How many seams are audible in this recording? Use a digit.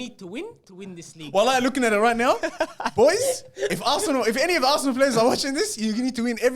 1